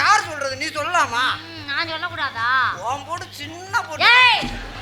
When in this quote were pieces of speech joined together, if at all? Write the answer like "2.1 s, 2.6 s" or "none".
none